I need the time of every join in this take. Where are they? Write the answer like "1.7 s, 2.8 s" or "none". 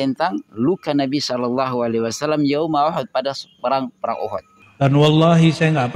4.6 s